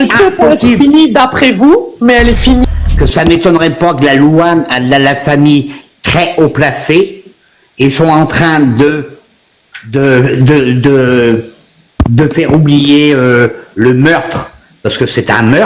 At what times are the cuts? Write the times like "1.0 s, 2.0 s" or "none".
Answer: 2.6 s